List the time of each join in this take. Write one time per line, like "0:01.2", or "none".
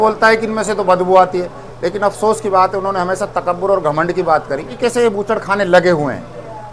0:01.5
0:04.8